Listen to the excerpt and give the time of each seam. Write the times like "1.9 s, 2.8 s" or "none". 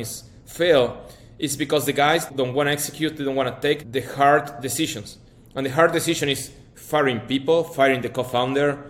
2.3 s, 3.9 s